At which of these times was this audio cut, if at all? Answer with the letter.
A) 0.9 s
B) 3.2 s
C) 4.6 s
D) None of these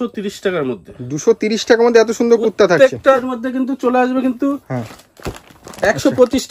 B